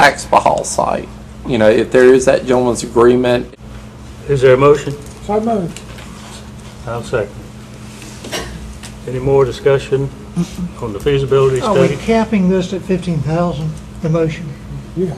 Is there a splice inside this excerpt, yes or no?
yes